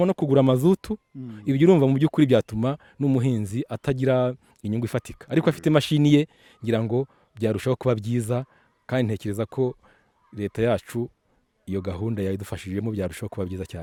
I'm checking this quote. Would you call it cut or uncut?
uncut